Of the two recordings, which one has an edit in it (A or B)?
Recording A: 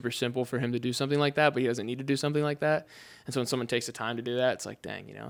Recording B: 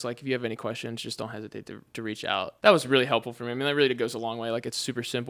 B